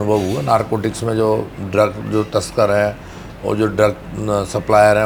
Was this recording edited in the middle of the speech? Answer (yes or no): no